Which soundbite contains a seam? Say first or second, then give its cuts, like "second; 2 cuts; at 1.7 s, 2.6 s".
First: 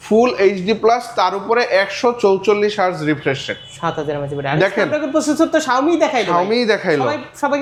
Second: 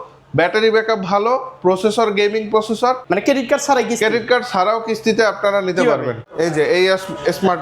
second; 2 cuts; at 3.0 s, 6.2 s